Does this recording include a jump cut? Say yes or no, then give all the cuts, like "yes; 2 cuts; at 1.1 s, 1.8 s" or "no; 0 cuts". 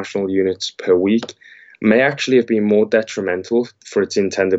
no; 0 cuts